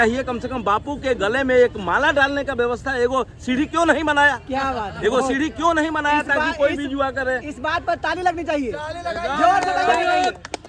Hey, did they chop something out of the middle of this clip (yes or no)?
no